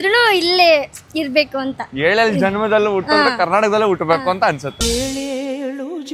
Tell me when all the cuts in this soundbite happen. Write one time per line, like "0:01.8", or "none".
none